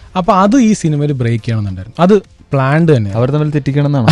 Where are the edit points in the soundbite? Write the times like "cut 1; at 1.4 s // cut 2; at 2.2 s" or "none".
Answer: none